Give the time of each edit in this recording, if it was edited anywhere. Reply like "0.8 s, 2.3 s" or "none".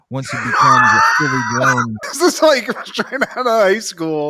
2.1 s